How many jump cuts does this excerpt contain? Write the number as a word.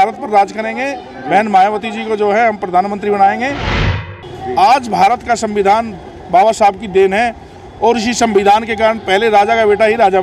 one